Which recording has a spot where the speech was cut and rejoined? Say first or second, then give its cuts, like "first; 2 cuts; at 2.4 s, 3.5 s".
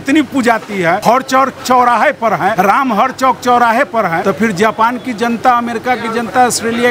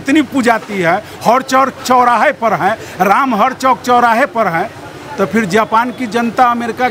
first; 3 cuts; at 1.0 s, 2.5 s, 4.2 s